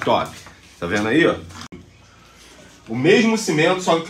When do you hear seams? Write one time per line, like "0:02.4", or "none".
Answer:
0:01.8